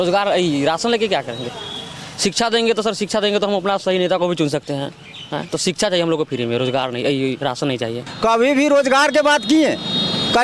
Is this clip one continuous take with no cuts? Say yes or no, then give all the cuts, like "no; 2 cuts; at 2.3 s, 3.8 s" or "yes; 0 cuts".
no; 1 cut; at 8.1 s